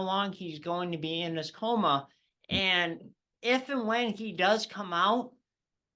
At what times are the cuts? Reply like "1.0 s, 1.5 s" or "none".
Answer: 3.3 s